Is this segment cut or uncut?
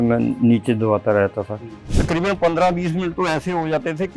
cut